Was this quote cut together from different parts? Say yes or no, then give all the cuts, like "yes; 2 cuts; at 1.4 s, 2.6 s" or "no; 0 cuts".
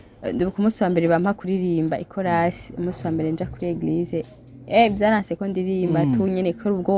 no; 0 cuts